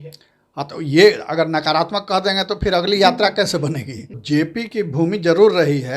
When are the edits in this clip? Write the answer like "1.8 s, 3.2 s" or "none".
4.2 s